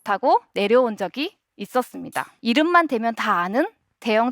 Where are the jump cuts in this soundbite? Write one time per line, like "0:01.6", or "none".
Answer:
0:02.3

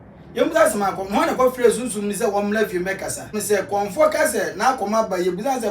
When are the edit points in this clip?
0:03.4

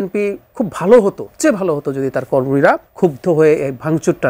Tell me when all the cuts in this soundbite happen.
0:01.3
0:02.9

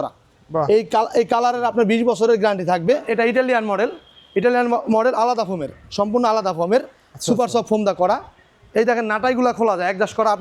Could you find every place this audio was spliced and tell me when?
0:03.0

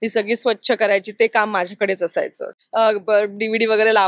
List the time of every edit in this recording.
0:02.5

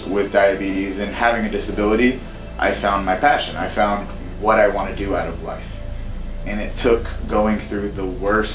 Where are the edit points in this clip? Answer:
none

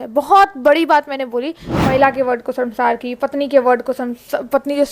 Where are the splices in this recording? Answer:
0:01.6

